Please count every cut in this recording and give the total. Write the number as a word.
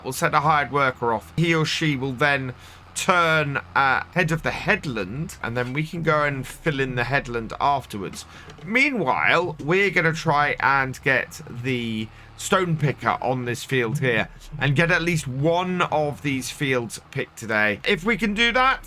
four